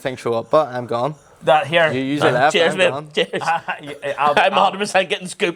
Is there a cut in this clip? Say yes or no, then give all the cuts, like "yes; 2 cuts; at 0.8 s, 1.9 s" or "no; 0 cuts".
no; 0 cuts